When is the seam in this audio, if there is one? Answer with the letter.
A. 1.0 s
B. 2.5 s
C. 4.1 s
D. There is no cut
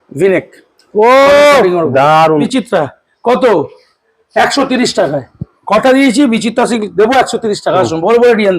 B